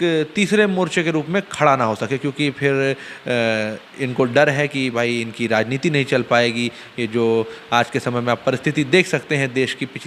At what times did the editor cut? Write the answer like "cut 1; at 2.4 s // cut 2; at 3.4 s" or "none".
none